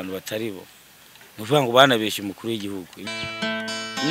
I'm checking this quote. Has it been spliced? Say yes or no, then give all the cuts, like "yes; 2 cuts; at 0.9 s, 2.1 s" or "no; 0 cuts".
yes; 1 cut; at 3.0 s